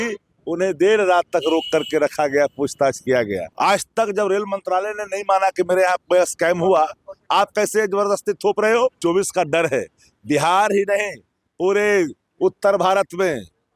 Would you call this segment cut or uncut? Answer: cut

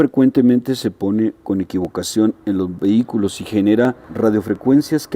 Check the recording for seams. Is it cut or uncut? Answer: uncut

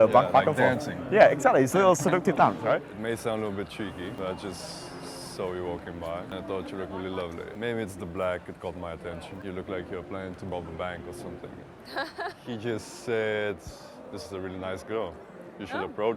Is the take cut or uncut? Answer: cut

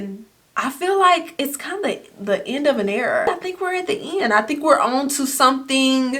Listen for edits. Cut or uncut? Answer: cut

